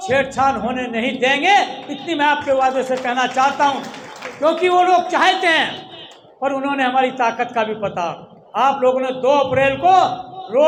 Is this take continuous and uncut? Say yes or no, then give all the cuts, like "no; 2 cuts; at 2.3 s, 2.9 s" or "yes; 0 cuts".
yes; 0 cuts